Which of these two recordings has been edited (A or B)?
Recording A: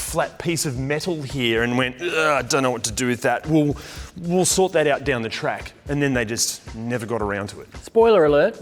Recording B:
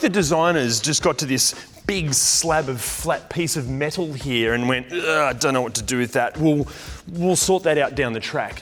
A